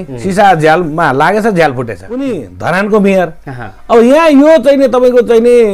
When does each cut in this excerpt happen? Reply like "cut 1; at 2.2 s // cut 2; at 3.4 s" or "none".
cut 1; at 2.1 s